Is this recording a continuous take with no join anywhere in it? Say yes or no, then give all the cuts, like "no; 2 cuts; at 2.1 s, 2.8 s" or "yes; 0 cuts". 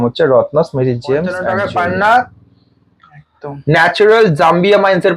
no; 1 cut; at 1.4 s